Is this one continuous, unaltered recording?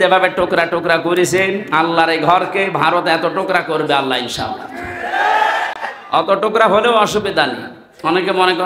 yes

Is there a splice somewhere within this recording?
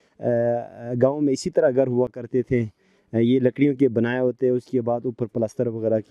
no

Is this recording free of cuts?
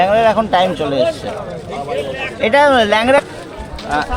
no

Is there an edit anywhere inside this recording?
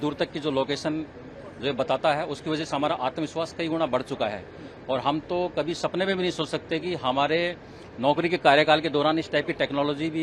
no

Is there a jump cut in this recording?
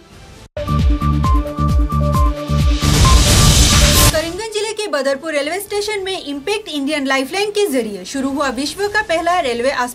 yes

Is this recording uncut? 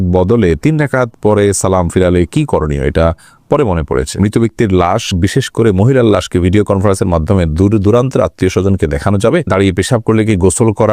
no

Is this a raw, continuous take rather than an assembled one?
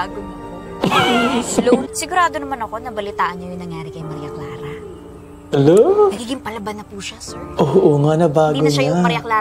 no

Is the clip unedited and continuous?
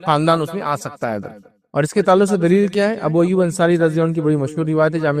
yes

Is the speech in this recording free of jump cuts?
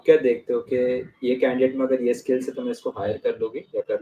yes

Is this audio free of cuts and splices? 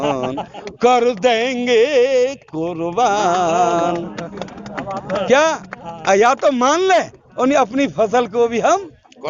yes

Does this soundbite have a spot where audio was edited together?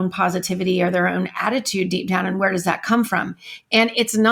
no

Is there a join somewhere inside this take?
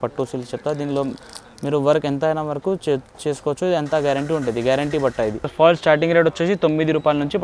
yes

